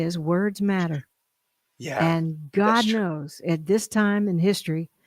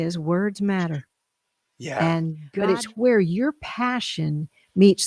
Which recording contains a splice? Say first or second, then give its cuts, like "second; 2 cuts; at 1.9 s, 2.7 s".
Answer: second; 1 cut; at 2.5 s